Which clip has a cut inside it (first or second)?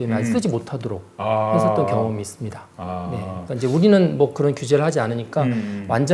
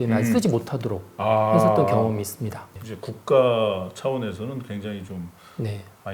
second